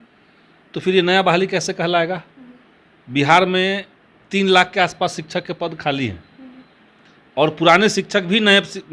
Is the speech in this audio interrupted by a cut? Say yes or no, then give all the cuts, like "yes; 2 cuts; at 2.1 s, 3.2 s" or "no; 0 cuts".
no; 0 cuts